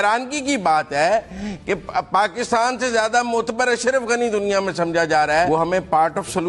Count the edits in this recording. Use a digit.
1